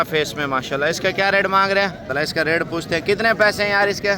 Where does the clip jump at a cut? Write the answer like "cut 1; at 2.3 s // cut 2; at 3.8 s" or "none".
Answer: cut 1; at 2.1 s

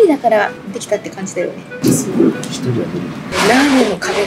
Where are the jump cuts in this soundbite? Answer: cut 1; at 1.7 s // cut 2; at 3.3 s

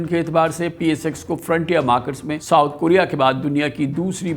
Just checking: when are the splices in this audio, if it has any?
cut 1; at 2.3 s

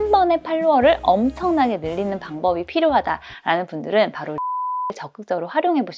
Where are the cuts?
none

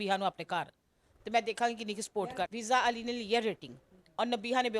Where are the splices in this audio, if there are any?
cut 1; at 2.5 s

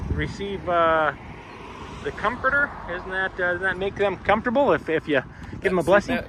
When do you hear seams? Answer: none

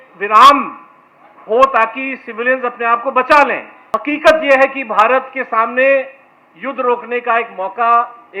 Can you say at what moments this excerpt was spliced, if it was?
cut 1; at 3.7 s

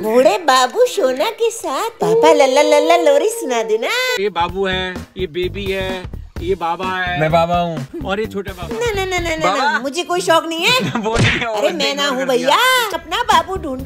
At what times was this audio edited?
cut 1; at 4.1 s // cut 2; at 7.9 s // cut 3; at 12.9 s

